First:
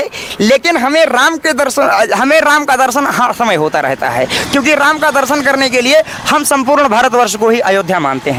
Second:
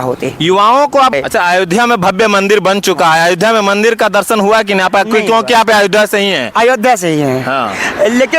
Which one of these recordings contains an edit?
second; 1 cut; at 1.1 s

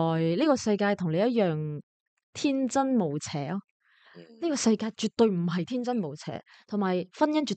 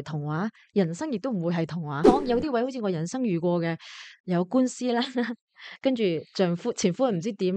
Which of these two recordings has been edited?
second; 1 cut; at 2.0 s

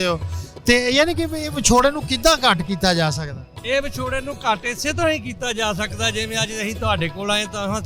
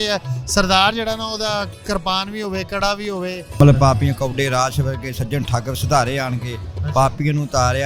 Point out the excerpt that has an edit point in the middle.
second; 1 cut; at 3.5 s

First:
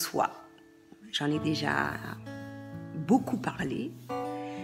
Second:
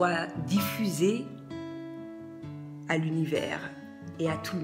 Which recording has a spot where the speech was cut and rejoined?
second; 2 cuts; at 1.4 s, 2.8 s

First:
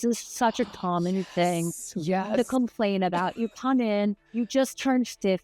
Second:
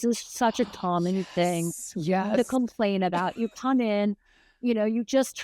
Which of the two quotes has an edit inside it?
first; 1 cut; at 4.3 s

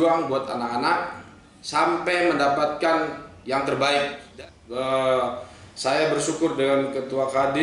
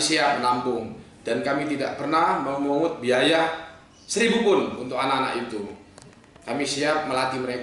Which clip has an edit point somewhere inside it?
first; 1 cut; at 4.2 s

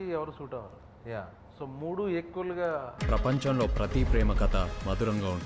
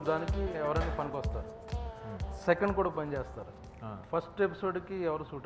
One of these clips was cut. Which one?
first; 1 cut; at 2.9 s

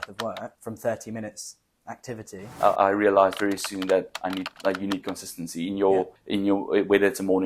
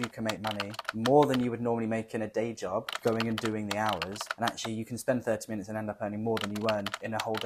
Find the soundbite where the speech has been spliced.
first; 1 cut; at 2.5 s

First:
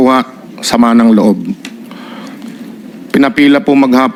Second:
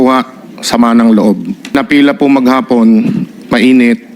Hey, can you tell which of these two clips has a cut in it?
second; 1 cut; at 1.7 s

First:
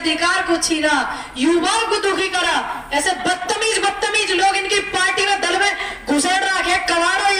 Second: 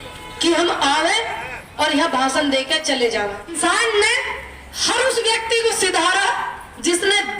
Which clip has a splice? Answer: second; 1 cut; at 3.6 s

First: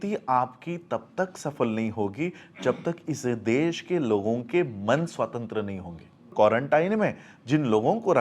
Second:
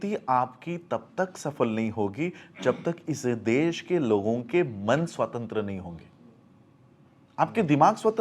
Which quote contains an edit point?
first; 1 cut; at 6.3 s

